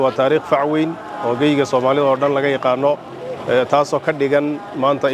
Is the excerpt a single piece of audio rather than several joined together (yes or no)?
yes